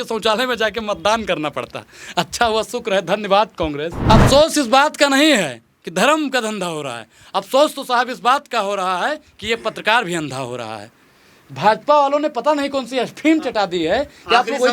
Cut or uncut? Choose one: cut